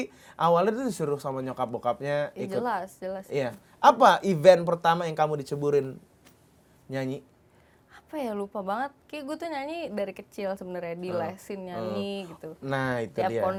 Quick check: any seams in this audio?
no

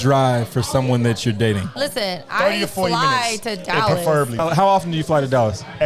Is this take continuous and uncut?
no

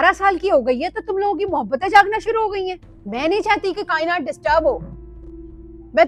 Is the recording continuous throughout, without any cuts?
yes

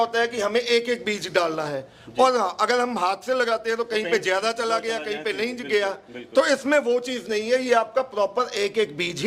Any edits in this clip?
no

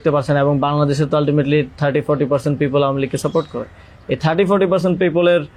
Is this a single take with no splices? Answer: yes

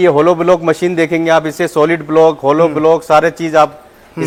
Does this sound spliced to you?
no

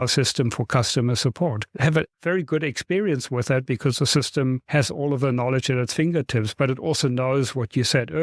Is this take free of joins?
yes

